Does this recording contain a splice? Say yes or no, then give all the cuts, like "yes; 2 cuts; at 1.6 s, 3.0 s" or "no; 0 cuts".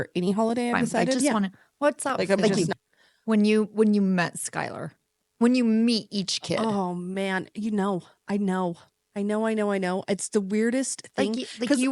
yes; 1 cut; at 1.2 s